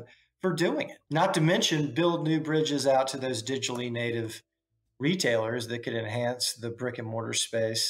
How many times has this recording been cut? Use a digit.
1